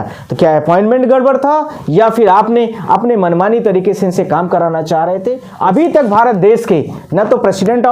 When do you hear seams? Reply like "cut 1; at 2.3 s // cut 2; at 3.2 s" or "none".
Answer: cut 1; at 5.5 s